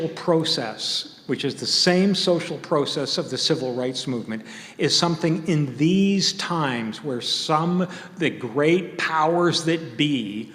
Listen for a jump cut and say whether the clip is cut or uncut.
uncut